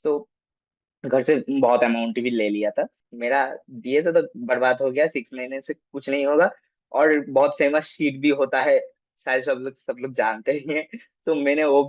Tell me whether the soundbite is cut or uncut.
cut